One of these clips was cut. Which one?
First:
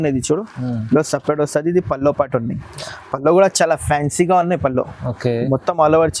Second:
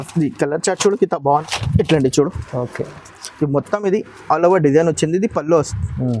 second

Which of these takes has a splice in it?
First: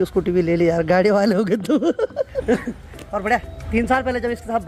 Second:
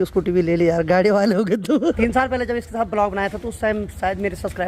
second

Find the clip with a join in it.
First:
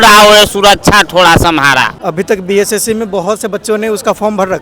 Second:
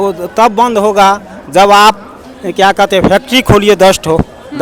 first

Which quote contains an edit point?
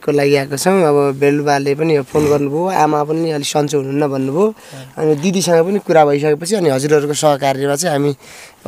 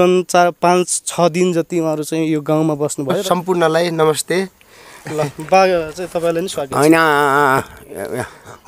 second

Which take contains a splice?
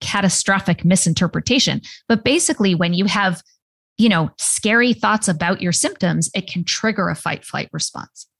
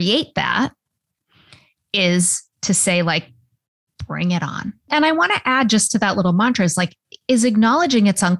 second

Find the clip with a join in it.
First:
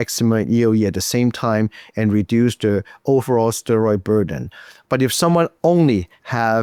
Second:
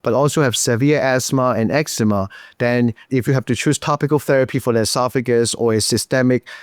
second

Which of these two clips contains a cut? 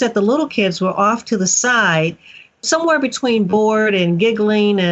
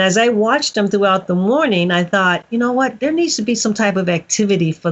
first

